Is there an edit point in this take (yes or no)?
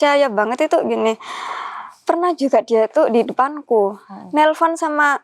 no